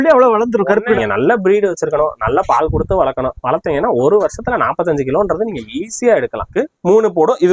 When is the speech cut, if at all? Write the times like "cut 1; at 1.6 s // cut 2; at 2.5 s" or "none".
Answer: cut 1; at 1.0 s // cut 2; at 6.5 s